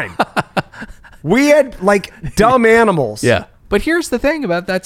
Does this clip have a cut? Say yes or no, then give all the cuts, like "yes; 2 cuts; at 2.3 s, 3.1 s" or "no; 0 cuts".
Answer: yes; 1 cut; at 3.5 s